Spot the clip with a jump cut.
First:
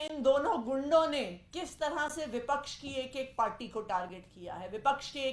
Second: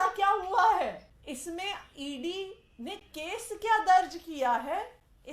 second; 1 cut; at 1.1 s

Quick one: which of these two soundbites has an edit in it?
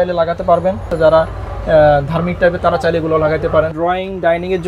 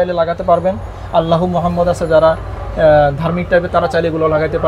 first; 2 cuts; at 0.9 s, 3.7 s

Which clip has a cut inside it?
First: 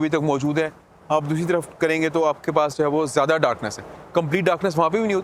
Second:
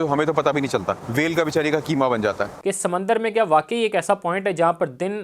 second; 2 cuts; at 1.0 s, 2.5 s

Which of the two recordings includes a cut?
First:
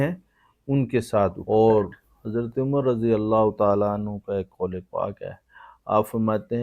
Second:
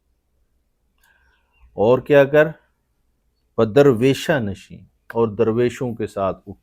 first; 1 cut; at 1.4 s

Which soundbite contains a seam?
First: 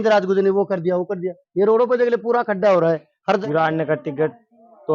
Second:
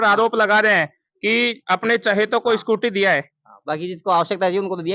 first; 1 cut; at 3.4 s

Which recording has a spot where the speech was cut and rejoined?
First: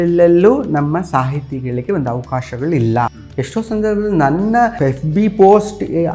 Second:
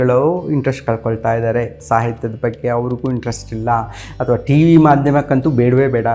first; 2 cuts; at 3.2 s, 4.7 s

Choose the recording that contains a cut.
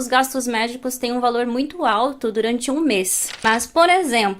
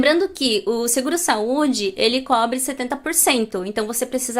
first; 1 cut; at 3.4 s

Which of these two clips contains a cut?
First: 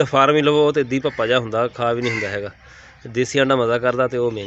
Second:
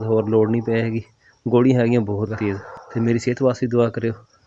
second; 1 cut; at 2.6 s

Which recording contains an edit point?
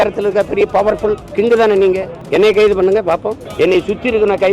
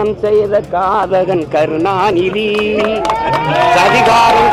first; 3 cuts; at 1.2 s, 2.1 s, 3.4 s

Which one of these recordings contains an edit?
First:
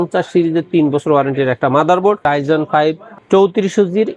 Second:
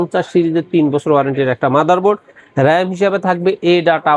first; 1 cut; at 2.2 s

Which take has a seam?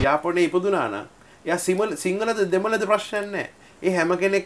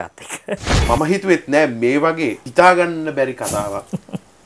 second; 2 cuts; at 0.8 s, 2.4 s

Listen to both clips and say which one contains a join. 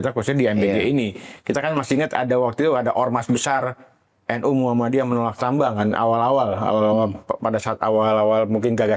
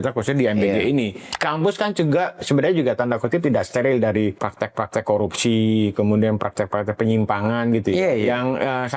second; 2 cuts; at 1.3 s, 4.5 s

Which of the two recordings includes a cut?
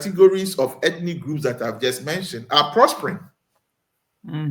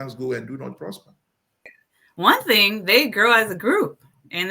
second; 1 cut; at 1.8 s

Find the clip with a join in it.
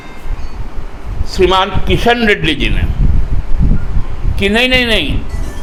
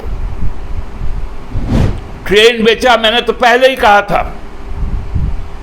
second; 1 cut; at 1.7 s

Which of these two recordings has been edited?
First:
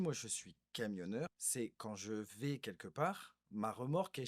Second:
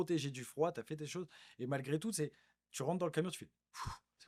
first; 1 cut; at 1.4 s

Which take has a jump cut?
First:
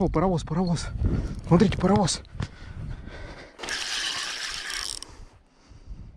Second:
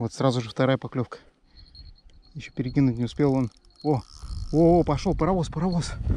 first; 1 cut; at 3.6 s

